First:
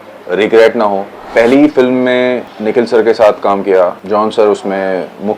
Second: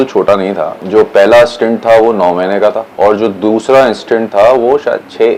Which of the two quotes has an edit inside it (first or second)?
first